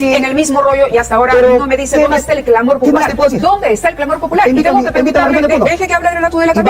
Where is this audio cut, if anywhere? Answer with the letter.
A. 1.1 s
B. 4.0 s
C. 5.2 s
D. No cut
D